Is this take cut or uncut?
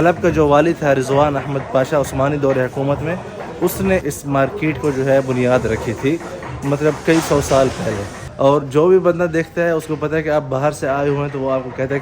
cut